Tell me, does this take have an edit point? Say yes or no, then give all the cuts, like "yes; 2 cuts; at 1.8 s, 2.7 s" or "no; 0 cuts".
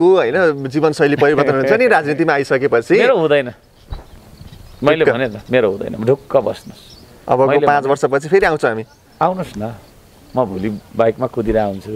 no; 0 cuts